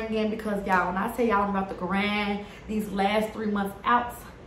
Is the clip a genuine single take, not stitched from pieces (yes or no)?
yes